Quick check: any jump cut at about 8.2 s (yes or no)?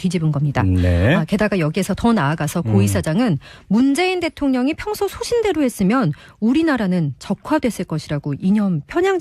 no